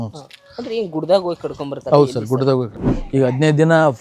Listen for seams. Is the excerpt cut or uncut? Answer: cut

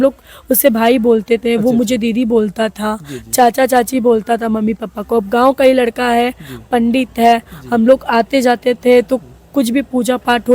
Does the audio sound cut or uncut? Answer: uncut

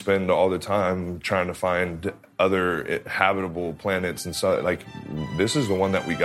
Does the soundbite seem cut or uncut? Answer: uncut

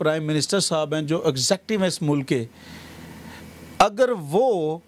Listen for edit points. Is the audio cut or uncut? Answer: uncut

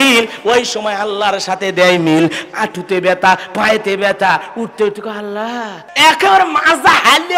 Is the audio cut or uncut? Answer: cut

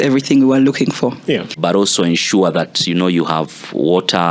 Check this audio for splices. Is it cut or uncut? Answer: cut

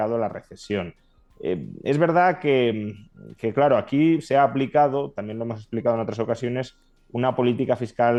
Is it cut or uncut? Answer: uncut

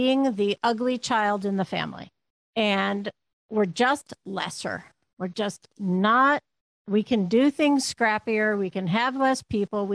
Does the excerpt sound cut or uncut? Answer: uncut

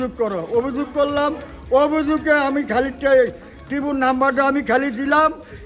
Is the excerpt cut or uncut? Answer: uncut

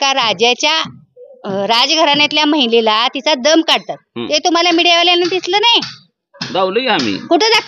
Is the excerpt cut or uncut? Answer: uncut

